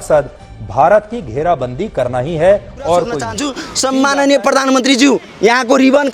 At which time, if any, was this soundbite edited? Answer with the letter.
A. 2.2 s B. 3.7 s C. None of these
B